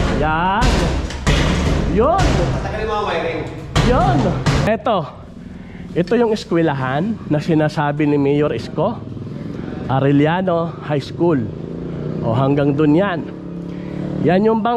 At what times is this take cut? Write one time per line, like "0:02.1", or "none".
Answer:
0:04.7